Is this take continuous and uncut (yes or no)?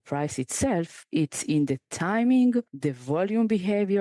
no